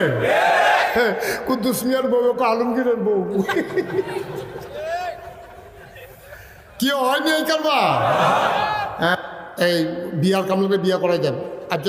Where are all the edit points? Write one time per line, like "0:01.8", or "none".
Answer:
0:09.1